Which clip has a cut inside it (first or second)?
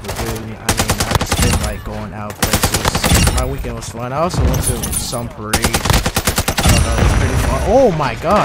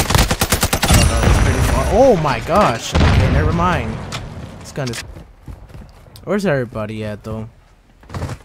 second